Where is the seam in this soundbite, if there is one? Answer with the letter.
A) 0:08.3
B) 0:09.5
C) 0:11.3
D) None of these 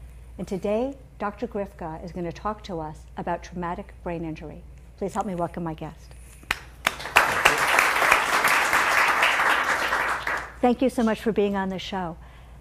A